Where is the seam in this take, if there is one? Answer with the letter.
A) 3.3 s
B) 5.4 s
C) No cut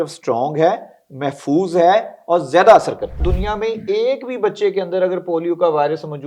A